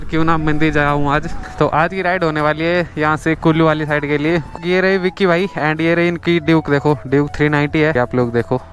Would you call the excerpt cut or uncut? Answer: cut